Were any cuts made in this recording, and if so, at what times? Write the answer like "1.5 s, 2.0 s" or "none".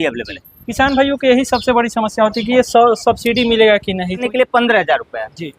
4.2 s